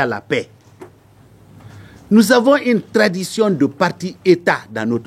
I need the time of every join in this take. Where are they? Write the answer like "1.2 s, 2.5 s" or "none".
none

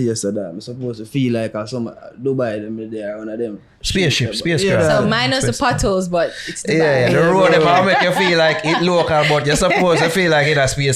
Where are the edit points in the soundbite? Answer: none

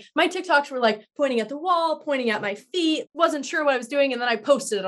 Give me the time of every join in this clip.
3.1 s

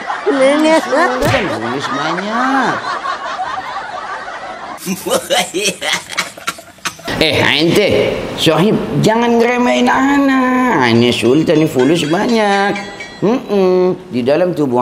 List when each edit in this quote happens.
none

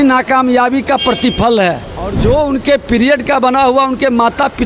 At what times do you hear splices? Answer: 2.1 s

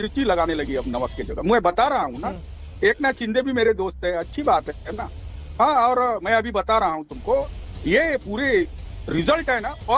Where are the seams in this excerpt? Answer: none

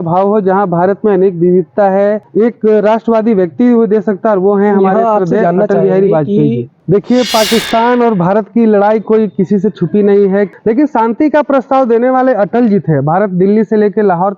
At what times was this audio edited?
2.2 s, 6.7 s, 10.5 s

